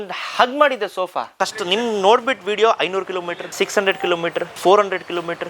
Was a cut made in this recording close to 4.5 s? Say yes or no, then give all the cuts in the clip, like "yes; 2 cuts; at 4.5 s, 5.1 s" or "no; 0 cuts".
yes; 3 cuts; at 1.3 s, 3.4 s, 4.5 s